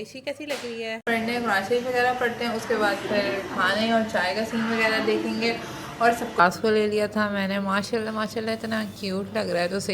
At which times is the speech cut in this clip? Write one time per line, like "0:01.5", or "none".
0:01.0
0:06.4

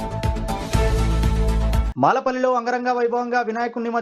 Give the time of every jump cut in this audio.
none

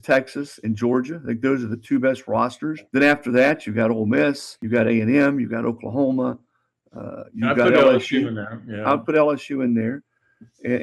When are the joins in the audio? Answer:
0:02.8
0:04.5

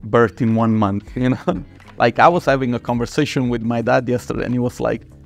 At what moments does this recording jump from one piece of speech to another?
0:01.8

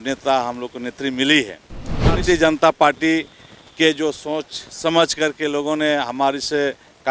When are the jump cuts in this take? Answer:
0:02.2

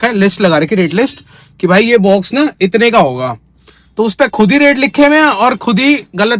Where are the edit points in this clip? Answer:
none

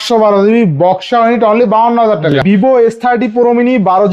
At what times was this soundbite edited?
0:02.4

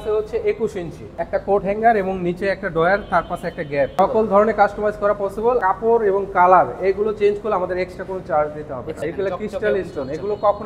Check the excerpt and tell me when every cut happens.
0:01.0
0:03.9
0:05.6
0:09.0

